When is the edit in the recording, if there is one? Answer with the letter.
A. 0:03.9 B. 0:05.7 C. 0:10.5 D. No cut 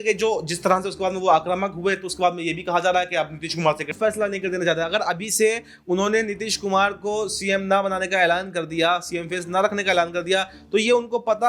A